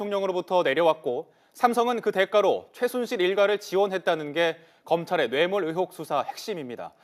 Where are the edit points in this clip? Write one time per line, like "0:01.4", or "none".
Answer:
none